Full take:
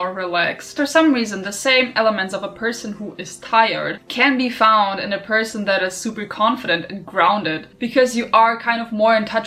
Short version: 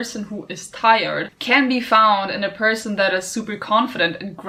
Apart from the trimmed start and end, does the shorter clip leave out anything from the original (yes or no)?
no